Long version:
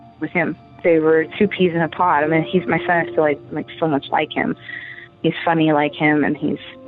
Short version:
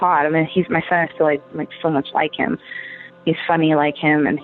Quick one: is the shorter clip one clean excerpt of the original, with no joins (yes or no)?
yes